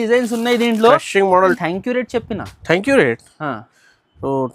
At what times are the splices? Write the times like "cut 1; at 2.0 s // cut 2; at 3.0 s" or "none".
cut 1; at 1.4 s